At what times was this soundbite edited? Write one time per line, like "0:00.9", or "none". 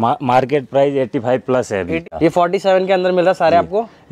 0:02.1